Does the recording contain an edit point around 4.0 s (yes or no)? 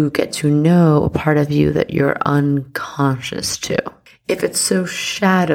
yes